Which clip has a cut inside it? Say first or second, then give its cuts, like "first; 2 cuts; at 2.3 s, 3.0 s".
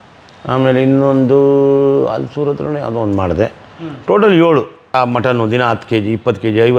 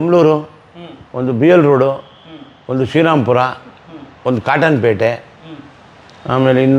first; 1 cut; at 4.9 s